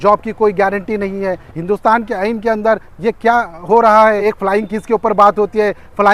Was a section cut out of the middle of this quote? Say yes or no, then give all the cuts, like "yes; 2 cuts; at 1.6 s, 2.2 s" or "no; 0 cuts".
yes; 2 cuts; at 1.5 s, 4.2 s